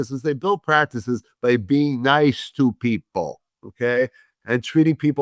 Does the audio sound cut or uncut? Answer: uncut